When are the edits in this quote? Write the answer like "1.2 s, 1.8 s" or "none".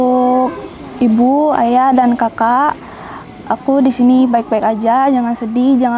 none